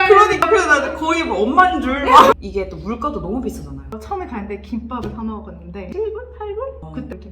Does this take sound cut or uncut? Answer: cut